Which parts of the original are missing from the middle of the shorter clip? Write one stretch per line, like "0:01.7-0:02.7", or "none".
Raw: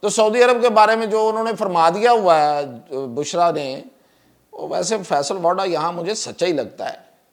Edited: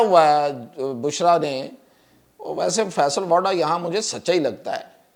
none